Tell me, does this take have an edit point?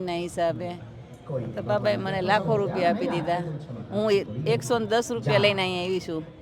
no; 0 cuts

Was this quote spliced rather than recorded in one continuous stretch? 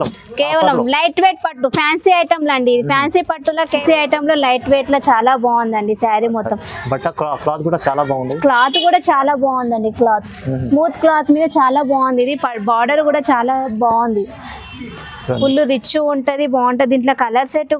yes; 2 cuts; at 3.8 s, 15.4 s

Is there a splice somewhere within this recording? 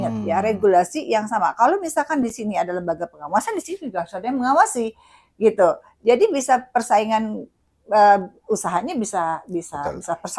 no; 0 cuts

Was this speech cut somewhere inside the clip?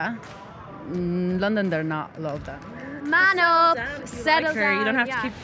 yes; 1 cut; at 3.0 s

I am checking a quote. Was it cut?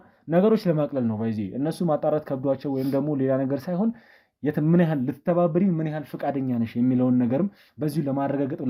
no; 0 cuts

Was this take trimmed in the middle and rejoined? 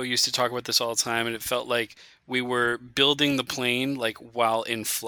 no; 0 cuts

